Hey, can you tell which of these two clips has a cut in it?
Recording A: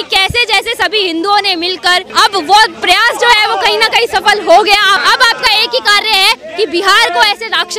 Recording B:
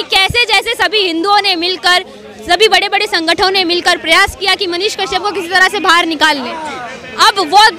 A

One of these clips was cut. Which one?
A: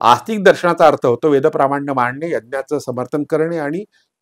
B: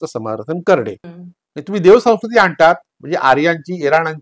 B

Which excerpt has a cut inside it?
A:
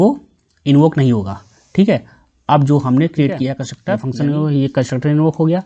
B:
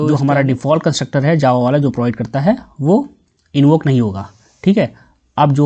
A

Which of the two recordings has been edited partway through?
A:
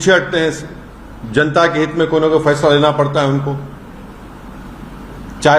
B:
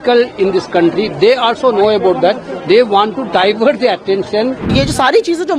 B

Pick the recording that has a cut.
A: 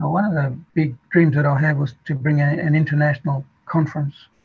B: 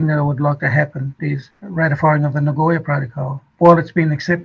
B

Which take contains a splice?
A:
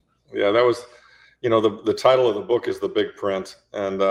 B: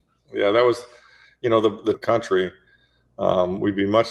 B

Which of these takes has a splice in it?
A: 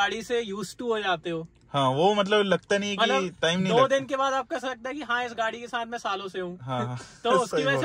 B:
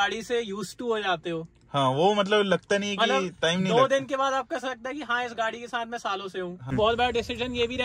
B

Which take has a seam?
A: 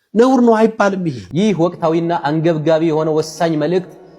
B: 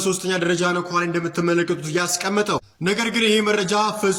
A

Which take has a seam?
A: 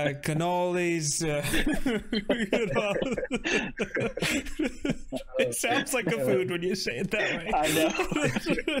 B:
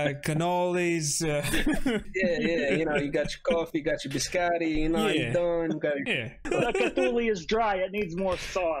B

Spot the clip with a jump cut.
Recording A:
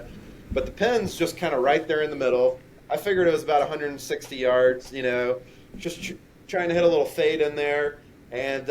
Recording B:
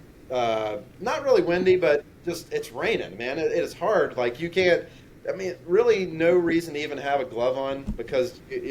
A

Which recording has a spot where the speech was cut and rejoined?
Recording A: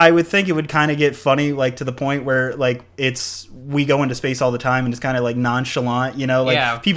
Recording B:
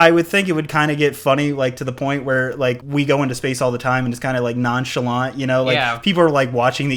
B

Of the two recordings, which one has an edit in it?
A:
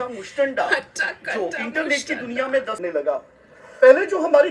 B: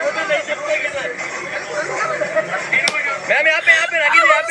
A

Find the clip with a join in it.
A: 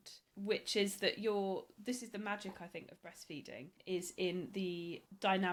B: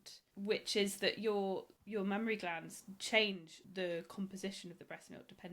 B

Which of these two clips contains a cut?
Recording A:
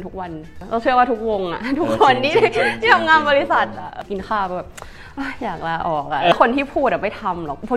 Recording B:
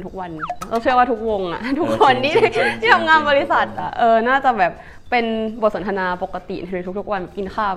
A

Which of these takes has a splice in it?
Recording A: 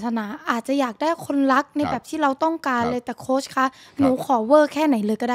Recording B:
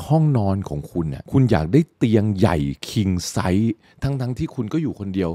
B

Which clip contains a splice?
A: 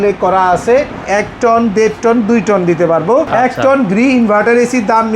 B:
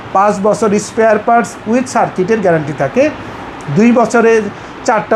A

